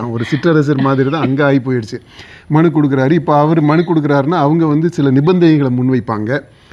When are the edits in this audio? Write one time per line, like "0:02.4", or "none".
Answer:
none